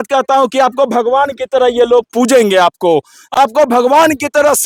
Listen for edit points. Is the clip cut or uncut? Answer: uncut